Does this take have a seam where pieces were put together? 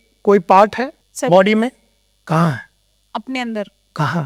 yes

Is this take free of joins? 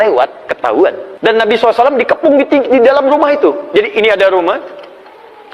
no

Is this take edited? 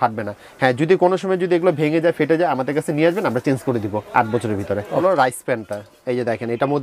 yes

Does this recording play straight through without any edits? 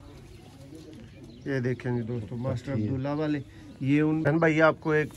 no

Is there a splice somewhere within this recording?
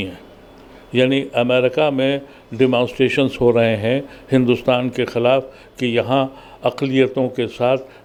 no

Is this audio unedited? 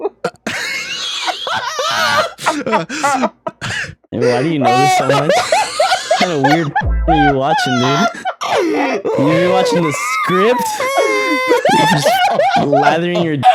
yes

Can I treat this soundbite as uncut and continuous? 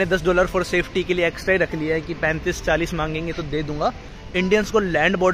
no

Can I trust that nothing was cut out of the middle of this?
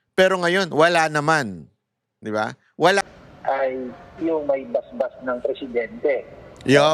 no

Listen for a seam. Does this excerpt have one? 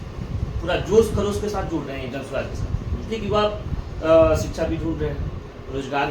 no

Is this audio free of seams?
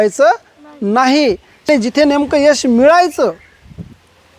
no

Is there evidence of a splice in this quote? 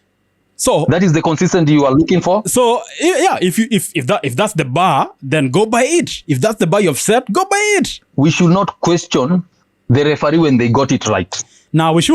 yes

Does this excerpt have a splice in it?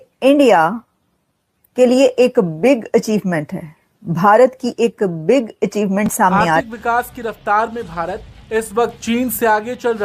yes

